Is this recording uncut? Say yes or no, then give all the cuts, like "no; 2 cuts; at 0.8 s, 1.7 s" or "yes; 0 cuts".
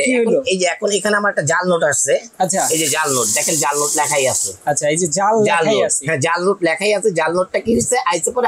yes; 0 cuts